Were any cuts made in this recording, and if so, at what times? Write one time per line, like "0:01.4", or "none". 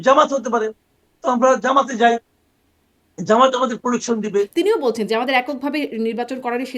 0:04.5